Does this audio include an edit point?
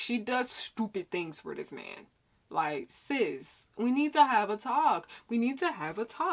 no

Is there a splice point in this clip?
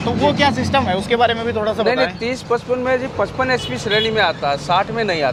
no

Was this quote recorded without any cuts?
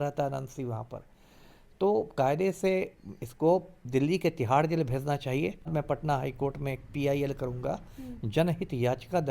no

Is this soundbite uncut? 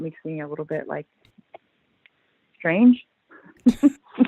yes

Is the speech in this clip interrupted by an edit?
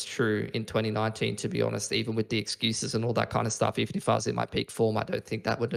no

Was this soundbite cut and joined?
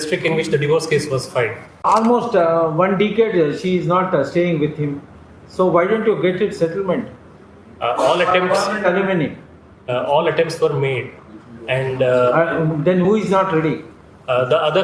yes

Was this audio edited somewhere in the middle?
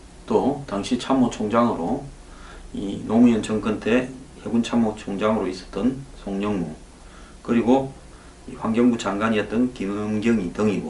yes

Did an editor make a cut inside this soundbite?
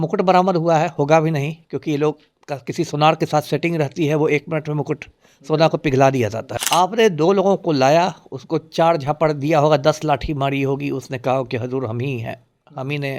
yes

